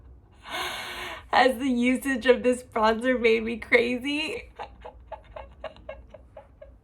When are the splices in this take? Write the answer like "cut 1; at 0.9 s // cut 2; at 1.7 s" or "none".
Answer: cut 1; at 4.3 s

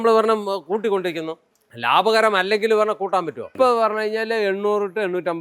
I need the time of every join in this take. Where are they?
cut 1; at 3.5 s

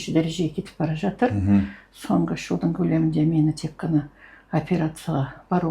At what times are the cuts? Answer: none

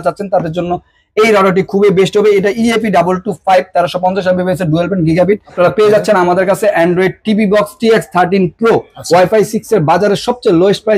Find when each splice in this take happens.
cut 1; at 5.5 s // cut 2; at 8.9 s

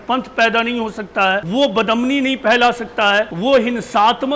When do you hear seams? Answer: cut 1; at 1.4 s // cut 2; at 3.3 s

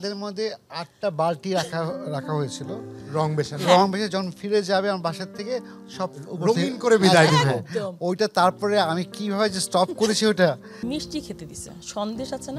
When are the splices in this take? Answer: cut 1; at 10.8 s

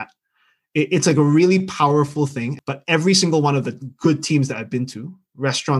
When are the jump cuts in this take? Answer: cut 1; at 2.5 s

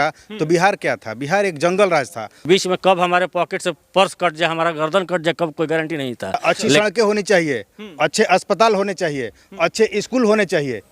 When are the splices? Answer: cut 1; at 2.4 s // cut 2; at 6.6 s

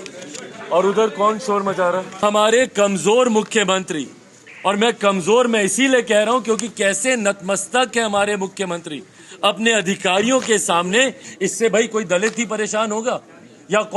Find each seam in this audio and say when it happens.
cut 1; at 2.2 s // cut 2; at 11.3 s

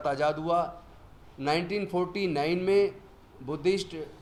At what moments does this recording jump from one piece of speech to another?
none

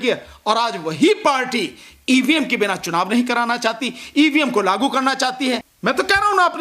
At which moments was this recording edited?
none

